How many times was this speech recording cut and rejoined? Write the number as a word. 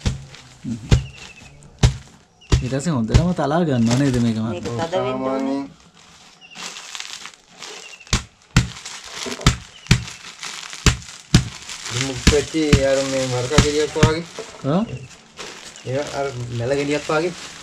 zero